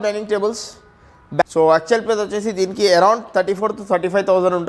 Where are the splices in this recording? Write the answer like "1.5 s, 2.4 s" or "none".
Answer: 1.4 s